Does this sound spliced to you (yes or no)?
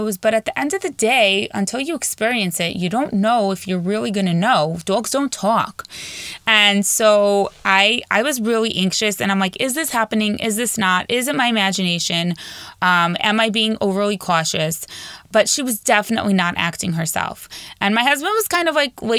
no